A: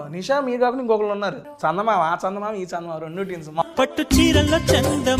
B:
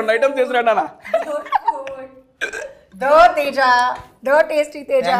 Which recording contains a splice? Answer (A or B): A